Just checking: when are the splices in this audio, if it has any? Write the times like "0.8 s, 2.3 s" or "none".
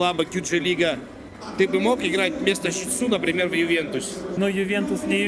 4.4 s